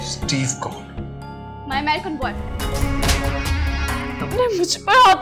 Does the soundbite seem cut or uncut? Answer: cut